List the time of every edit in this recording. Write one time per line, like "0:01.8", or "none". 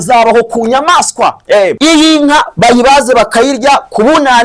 0:01.8